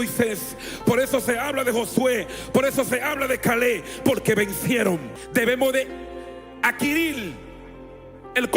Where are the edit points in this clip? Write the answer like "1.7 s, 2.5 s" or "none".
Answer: 5.2 s